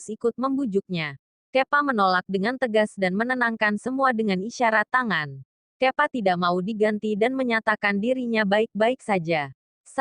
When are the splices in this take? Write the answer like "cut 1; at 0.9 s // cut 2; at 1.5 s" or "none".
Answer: none